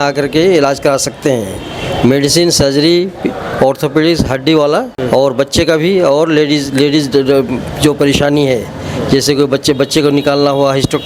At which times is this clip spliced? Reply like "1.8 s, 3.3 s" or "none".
4.9 s